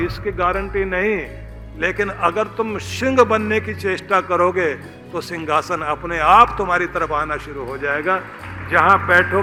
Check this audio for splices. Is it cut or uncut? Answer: uncut